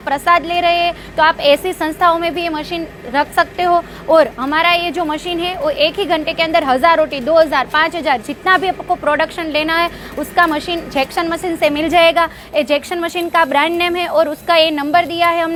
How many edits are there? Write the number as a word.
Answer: zero